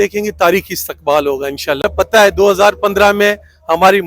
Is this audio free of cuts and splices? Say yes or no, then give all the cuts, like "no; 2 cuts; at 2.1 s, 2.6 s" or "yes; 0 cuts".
no; 1 cut; at 1.8 s